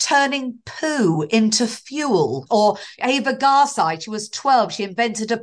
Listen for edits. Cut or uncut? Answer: cut